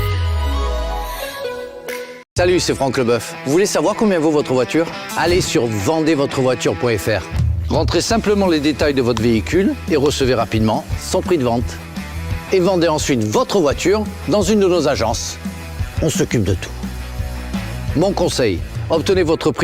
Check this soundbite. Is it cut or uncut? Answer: cut